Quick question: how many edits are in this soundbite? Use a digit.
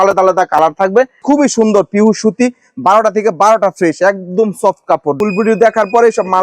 2